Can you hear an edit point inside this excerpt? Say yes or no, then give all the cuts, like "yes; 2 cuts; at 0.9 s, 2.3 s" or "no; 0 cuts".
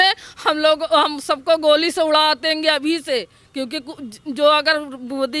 no; 0 cuts